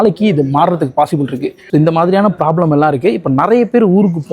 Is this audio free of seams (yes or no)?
no